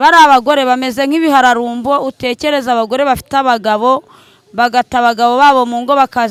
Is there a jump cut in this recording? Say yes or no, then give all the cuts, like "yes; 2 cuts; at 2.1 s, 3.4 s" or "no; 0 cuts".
no; 0 cuts